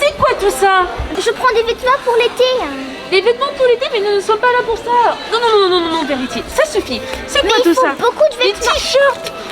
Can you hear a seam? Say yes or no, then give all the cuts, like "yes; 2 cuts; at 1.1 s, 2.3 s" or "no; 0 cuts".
no; 0 cuts